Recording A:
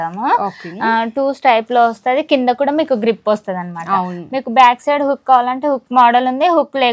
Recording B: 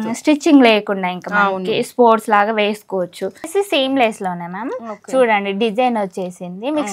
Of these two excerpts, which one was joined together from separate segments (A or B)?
B